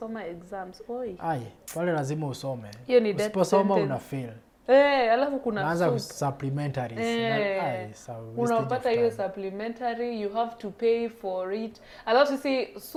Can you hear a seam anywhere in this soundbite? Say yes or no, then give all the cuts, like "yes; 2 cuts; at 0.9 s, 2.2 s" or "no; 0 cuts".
no; 0 cuts